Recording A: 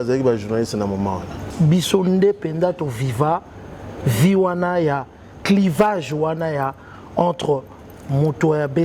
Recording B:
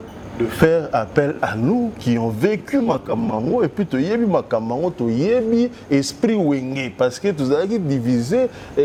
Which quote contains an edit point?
A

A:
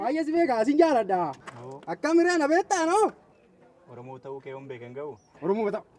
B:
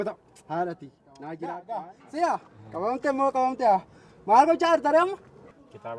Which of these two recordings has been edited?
B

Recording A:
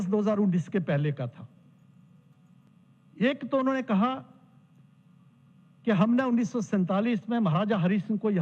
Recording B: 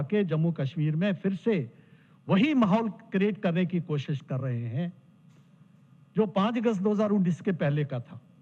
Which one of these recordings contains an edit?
A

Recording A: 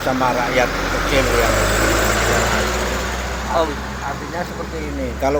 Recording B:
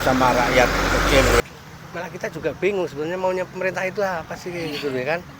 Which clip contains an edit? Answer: B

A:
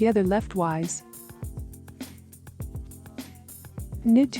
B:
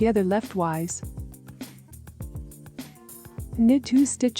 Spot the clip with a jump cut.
B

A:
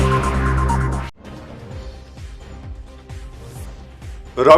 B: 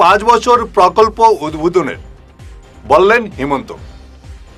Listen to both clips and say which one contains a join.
A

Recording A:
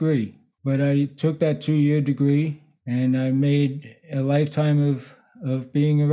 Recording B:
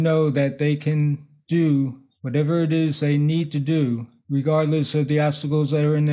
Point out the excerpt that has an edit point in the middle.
B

